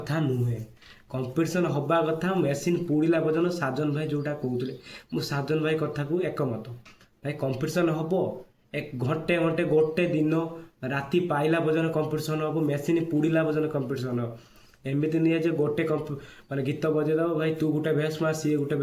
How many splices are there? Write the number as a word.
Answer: zero